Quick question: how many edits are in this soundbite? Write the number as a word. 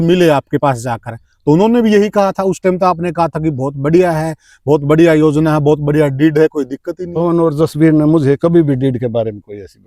zero